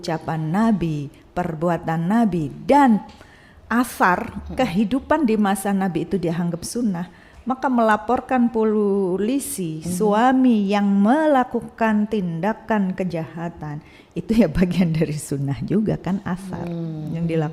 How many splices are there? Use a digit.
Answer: 0